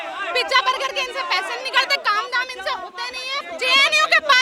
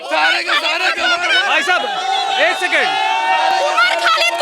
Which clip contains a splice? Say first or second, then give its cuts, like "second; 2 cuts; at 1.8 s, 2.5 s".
first; 1 cut; at 3.4 s